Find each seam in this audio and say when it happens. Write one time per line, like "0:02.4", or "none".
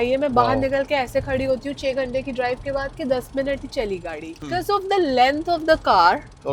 0:04.4